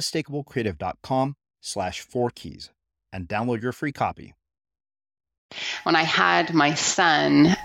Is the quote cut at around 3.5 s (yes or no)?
no